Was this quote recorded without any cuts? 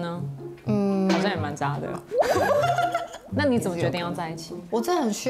no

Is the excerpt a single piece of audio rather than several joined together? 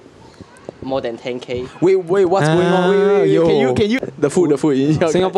no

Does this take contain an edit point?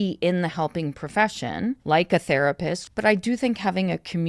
yes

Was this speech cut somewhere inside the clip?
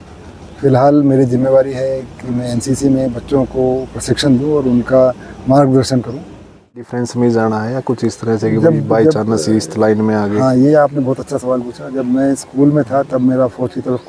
yes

